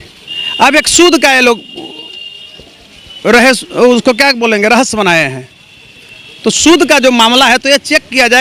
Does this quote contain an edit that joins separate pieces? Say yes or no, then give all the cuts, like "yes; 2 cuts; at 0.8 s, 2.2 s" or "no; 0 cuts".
no; 0 cuts